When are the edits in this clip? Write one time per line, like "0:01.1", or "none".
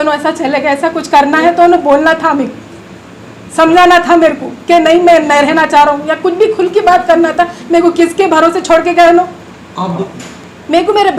0:10.0